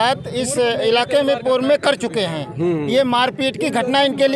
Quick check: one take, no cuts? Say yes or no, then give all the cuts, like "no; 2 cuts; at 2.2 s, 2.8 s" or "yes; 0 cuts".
yes; 0 cuts